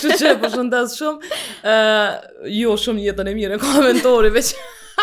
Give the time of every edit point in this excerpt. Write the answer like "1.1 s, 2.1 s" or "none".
none